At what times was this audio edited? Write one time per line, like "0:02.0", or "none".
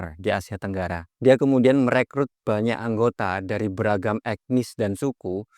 0:01.1